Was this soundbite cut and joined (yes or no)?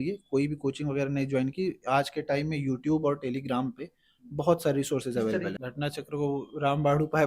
yes